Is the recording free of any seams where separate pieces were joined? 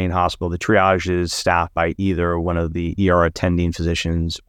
yes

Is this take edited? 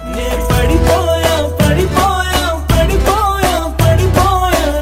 no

